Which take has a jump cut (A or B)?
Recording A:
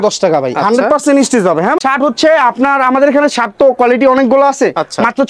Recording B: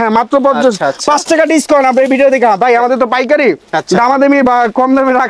A